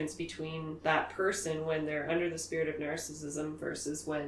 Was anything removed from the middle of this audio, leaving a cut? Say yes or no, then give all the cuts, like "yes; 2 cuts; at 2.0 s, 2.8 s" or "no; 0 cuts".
no; 0 cuts